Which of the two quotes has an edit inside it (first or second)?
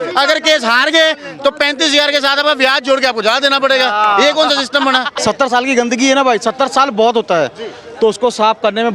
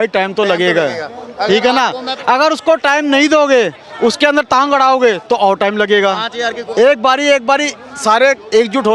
first